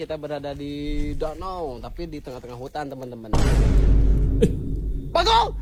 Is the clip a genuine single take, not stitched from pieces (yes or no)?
yes